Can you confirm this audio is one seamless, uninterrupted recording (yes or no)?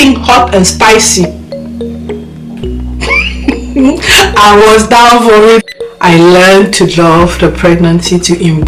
no